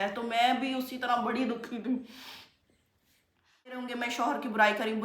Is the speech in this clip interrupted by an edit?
yes; 1 cut; at 3.8 s

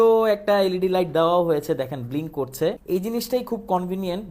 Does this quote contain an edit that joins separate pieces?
yes; 1 cut; at 2.8 s

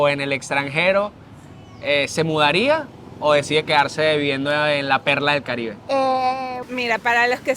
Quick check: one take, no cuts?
no; 1 cut; at 6.6 s

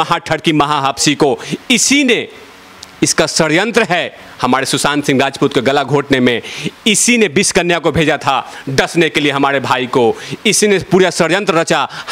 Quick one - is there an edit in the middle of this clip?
no; 0 cuts

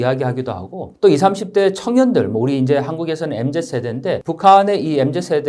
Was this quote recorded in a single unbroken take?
yes; 0 cuts

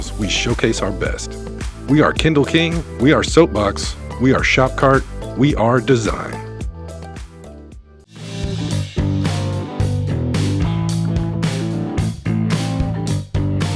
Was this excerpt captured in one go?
no; 1 cut; at 8.2 s

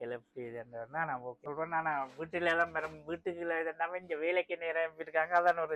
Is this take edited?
yes; 1 cut; at 1.4 s

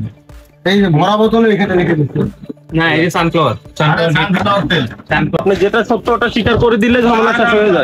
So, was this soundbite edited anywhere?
yes; 1 cut; at 5.4 s

